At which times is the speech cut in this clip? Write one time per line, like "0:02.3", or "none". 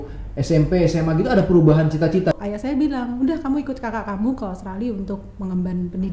0:02.3